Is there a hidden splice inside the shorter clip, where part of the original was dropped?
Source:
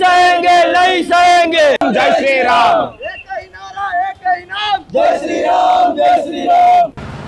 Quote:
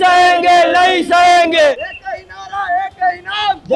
yes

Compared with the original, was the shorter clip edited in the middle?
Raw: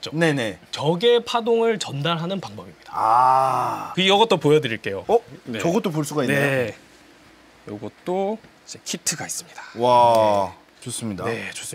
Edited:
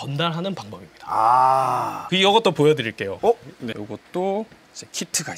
yes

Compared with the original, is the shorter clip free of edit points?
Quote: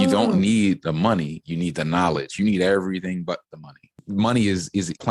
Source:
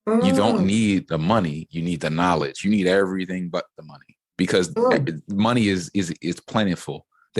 no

